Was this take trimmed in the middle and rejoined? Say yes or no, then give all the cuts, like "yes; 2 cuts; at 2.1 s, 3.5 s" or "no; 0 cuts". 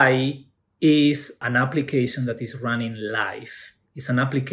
yes; 1 cut; at 1.4 s